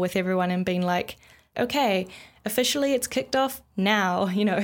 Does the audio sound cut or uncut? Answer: cut